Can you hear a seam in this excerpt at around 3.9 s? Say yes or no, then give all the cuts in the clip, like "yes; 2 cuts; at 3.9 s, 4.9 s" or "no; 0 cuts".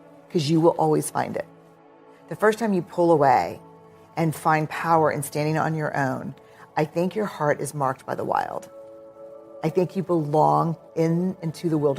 no; 1 cut; at 2.0 s